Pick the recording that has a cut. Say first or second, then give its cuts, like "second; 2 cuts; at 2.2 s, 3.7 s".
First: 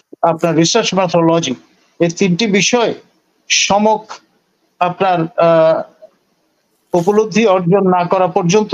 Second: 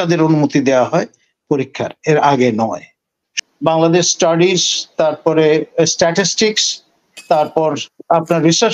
second; 1 cut; at 3.2 s